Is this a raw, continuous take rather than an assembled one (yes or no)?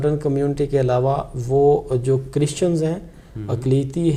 yes